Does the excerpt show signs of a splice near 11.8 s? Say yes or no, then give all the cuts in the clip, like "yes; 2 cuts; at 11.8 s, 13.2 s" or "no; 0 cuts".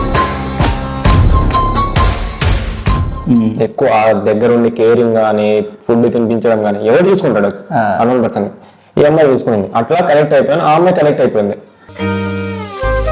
no; 1 cut; at 3.1 s